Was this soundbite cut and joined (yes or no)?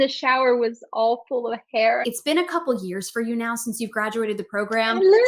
yes